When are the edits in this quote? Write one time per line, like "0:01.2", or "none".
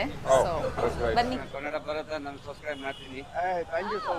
0:01.5